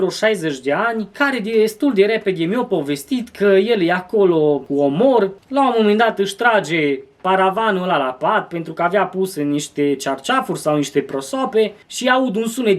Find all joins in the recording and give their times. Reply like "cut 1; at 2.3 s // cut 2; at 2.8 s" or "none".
cut 1; at 1.1 s // cut 2; at 4.7 s // cut 3; at 5.4 s // cut 4; at 11.8 s